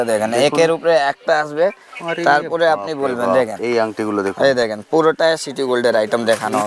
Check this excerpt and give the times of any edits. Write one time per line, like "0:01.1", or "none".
none